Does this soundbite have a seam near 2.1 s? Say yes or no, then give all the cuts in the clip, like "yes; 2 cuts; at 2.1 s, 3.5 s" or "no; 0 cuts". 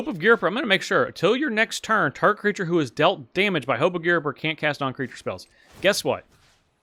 no; 0 cuts